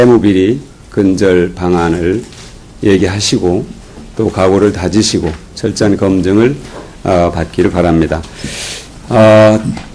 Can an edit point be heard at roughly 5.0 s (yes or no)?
yes